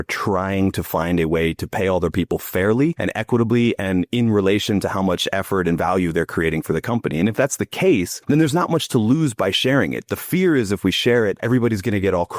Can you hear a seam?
yes; 3 cuts; at 3.0 s, 8.1 s, 11.4 s

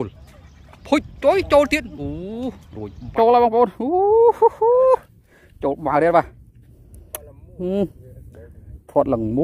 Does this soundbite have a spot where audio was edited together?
yes; 1 cut; at 3.1 s

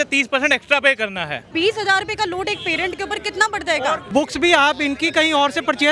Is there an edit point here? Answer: yes; 2 cuts; at 1.5 s, 4.1 s

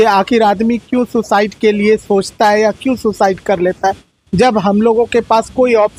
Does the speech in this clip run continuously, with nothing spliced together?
yes; 0 cuts

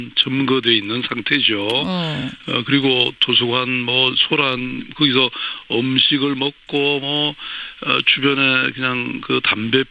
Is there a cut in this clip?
yes; 1 cut; at 4.9 s

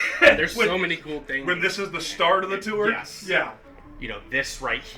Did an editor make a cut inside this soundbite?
yes; 1 cut; at 3.6 s

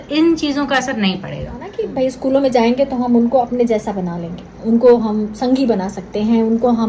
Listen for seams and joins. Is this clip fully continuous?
no; 2 cuts; at 1.8 s, 4.6 s

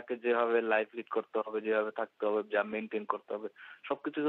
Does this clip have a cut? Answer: no; 0 cuts

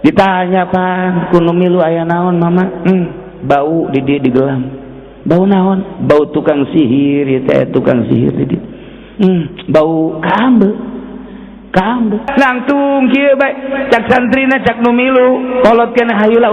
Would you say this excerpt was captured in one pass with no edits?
no; 1 cut; at 12.3 s

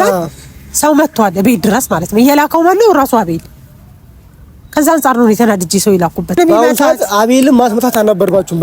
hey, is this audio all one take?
no; 1 cut; at 6.4 s

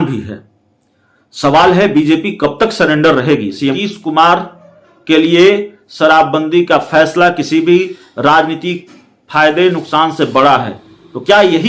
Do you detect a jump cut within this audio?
yes; 1 cut; at 3.8 s

